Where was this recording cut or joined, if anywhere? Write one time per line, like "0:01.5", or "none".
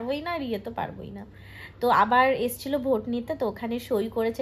none